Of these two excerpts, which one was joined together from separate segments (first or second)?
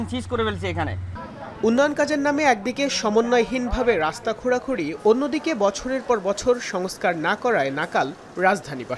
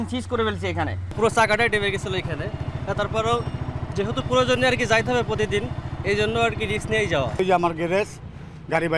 second